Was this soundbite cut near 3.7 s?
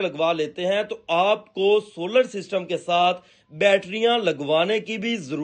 no; 0 cuts

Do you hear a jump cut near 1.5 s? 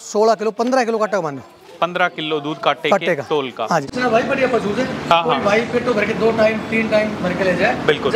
no; 1 cut; at 3.9 s

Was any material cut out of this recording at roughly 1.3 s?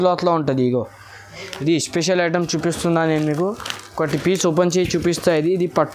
yes; 1 cut; at 1.3 s

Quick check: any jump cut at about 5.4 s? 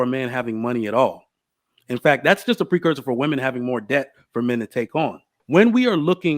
yes; 1 cut; at 5.4 s

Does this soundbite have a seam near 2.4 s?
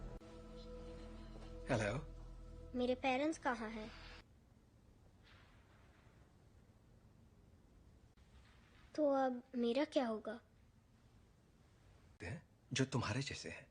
no; 1 cut; at 4.3 s

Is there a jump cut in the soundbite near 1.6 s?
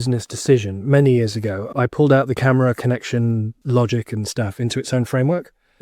yes; 2 cuts; at 1.6 s, 3.5 s

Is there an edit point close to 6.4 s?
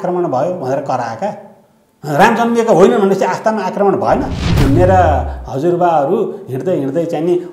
no; 1 cut; at 4.5 s

